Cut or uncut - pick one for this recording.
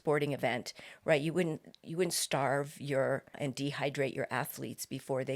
cut